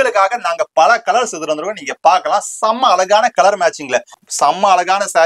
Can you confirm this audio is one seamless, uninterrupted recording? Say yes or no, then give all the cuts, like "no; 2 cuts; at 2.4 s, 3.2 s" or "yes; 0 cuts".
no; 1 cut; at 4.2 s